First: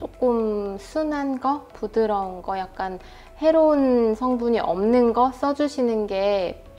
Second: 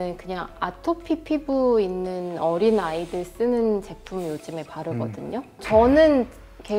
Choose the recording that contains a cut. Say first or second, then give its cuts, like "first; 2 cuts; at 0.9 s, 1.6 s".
second; 1 cut; at 5.5 s